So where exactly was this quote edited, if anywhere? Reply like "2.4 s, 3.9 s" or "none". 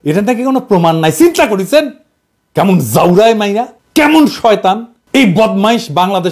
3.8 s, 4.9 s